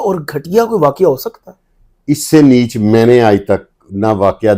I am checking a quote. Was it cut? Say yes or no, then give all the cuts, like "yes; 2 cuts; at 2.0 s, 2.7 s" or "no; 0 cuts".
no; 0 cuts